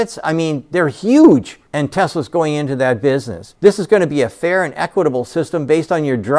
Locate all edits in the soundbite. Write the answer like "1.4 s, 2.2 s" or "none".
none

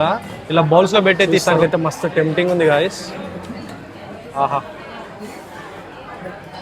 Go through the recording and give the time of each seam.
1.5 s

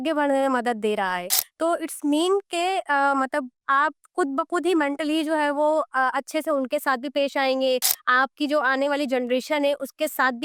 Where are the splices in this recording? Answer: none

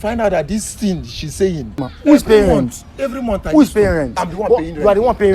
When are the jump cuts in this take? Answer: 1.9 s

